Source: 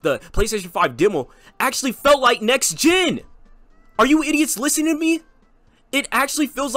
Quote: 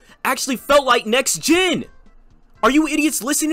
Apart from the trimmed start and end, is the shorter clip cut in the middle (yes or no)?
no